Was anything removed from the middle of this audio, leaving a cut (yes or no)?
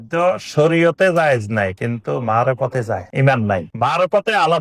yes